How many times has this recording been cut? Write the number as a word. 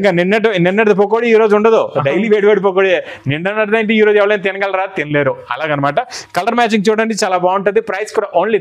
zero